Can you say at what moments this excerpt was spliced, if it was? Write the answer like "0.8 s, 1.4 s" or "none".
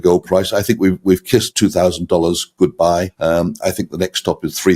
1.5 s, 3.1 s

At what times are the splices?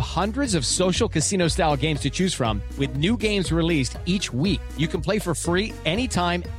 none

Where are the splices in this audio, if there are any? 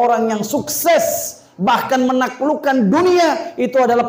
none

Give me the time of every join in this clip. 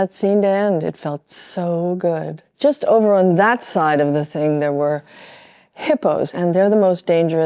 2.4 s, 6.3 s

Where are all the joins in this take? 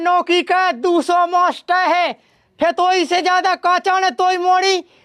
none

